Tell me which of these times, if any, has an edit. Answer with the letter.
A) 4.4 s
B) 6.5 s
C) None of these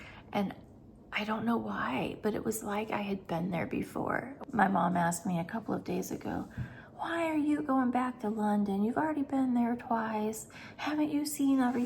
A